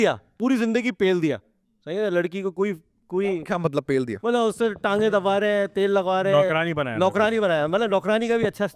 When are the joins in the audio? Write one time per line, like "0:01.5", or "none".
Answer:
none